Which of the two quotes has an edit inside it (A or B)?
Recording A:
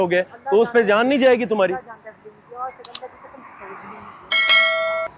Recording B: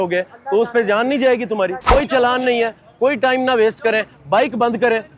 B